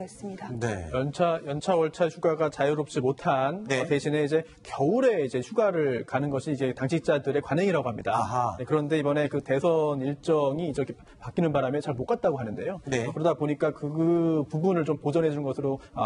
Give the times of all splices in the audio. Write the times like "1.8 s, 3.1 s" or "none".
none